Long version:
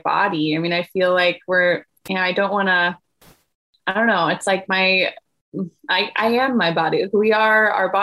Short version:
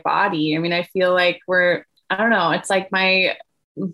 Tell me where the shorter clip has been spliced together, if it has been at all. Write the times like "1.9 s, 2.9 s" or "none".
1.9 s

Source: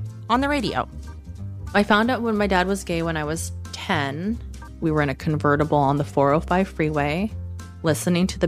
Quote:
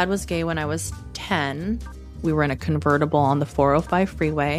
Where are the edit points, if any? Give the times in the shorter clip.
none

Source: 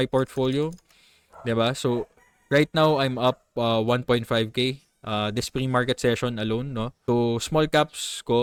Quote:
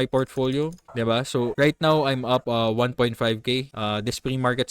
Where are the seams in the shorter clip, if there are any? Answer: 1.3 s, 2.5 s, 3.7 s

